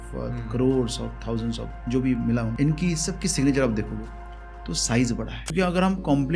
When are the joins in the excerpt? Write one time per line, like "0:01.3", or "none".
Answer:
0:02.5
0:05.5

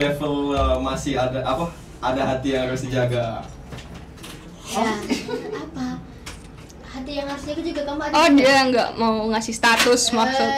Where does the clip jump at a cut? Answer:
none

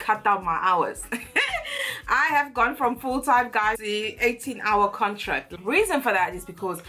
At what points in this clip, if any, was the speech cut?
0:03.7
0:05.5

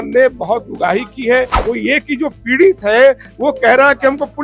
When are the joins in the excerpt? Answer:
0:01.6

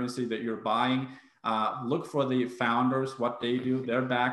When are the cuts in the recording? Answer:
none

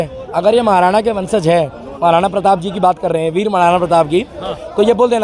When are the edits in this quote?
none

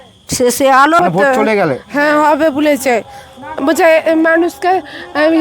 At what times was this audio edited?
0:01.0

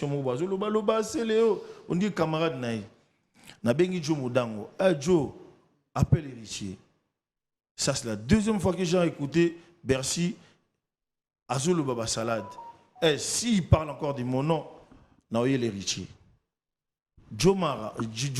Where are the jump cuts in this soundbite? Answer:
none

